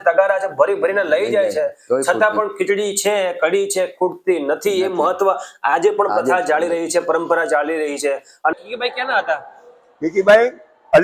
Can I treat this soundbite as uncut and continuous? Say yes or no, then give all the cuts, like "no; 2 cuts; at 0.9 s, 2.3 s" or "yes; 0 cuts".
no; 1 cut; at 8.5 s